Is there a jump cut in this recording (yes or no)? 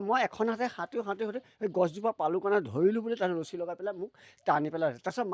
no